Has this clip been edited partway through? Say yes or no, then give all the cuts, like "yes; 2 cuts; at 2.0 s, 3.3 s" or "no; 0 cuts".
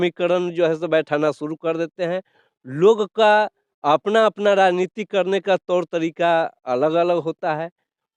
no; 0 cuts